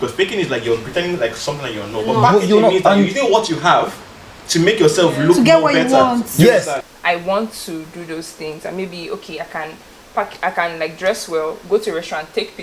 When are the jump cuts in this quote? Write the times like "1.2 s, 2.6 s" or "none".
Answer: 6.8 s